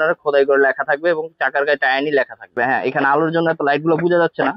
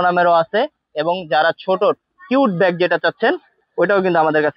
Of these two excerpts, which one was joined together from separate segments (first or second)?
first